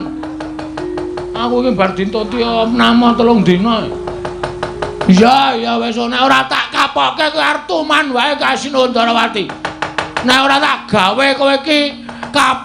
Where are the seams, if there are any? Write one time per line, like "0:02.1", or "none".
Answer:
none